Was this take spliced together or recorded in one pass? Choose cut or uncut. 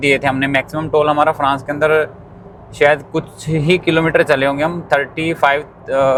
uncut